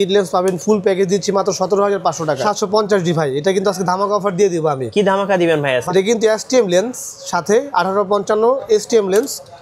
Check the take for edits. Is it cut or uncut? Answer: cut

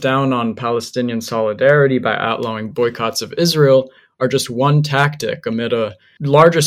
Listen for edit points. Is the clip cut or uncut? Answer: uncut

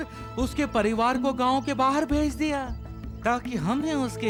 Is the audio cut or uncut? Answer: uncut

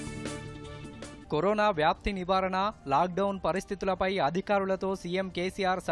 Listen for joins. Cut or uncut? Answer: cut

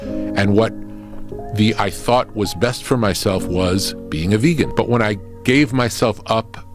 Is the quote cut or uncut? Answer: cut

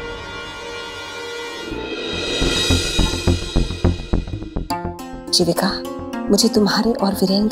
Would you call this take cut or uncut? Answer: cut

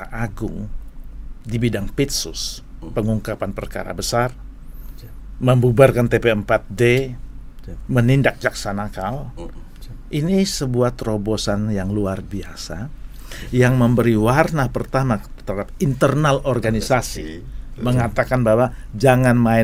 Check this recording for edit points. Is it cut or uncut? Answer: uncut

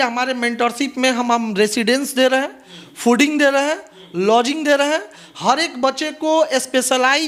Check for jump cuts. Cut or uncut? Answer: uncut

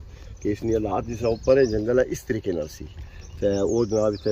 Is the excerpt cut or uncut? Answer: uncut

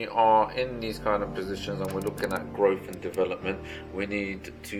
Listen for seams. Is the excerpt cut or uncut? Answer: uncut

